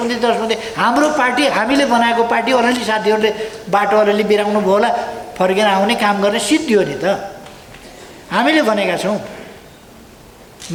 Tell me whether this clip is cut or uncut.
uncut